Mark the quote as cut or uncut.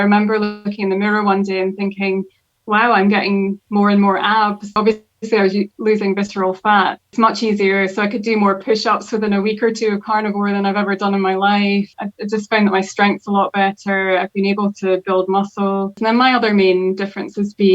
cut